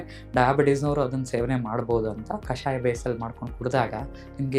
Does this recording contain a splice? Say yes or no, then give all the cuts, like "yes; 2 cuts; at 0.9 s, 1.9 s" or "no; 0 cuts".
yes; 1 cut; at 2.5 s